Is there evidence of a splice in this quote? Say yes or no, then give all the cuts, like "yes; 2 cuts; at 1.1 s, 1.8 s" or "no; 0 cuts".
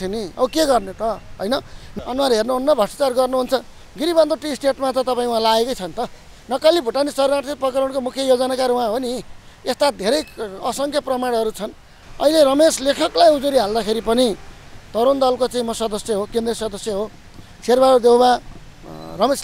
yes; 2 cuts; at 1.8 s, 12.0 s